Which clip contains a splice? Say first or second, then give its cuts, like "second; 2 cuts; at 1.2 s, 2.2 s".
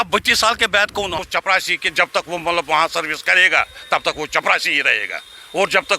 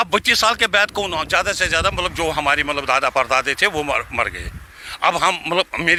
first; 1 cut; at 1.3 s